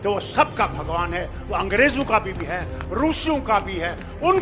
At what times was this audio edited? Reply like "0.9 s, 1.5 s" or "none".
none